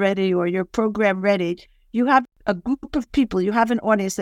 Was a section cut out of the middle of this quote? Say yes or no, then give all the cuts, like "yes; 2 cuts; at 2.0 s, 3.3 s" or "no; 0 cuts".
yes; 1 cut; at 2.2 s